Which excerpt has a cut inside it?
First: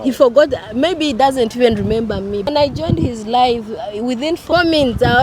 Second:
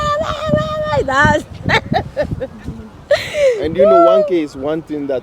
first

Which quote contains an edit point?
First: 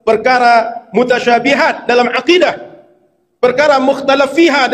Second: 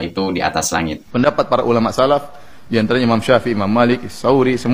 second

